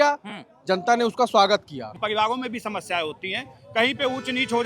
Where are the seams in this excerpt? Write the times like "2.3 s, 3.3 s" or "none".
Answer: 1.9 s